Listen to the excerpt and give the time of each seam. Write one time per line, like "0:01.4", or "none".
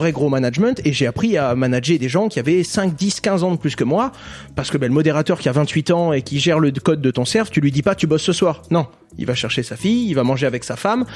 none